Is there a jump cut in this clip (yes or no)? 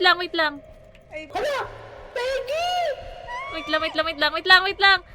yes